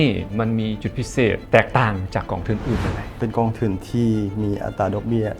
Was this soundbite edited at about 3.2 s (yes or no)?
yes